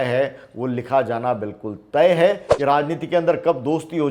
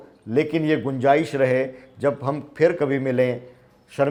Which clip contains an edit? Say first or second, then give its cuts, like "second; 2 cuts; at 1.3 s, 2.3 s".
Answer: first; 1 cut; at 2.5 s